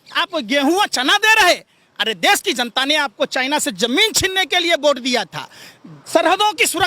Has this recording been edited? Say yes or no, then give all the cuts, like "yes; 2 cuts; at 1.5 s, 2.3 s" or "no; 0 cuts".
no; 0 cuts